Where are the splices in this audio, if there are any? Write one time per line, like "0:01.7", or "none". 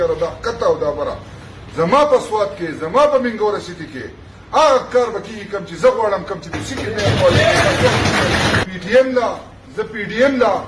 0:08.6